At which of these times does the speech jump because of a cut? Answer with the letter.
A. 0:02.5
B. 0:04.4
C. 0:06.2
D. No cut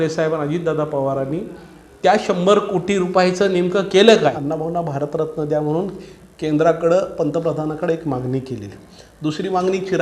B